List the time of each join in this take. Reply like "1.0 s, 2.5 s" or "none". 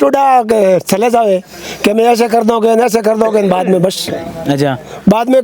none